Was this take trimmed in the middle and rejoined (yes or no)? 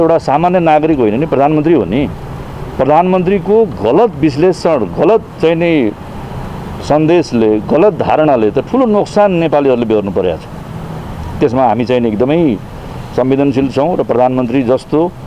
no